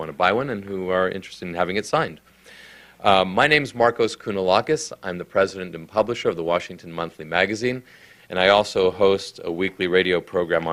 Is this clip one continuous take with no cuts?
yes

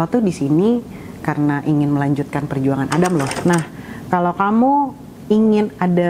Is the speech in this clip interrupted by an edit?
yes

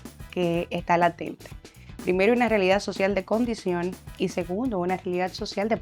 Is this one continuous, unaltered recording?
yes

